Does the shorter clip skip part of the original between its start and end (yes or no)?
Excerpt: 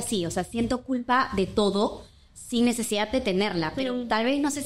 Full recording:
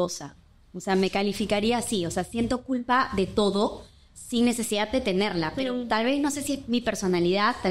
no